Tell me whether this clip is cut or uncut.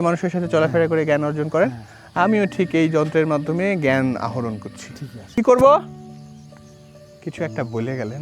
cut